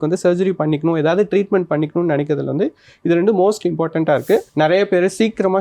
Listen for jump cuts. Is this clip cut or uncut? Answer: cut